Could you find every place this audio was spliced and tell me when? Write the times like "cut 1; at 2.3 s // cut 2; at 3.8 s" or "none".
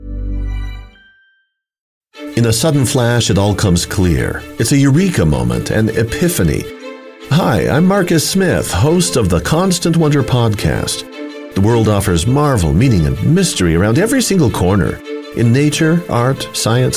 cut 1; at 2.0 s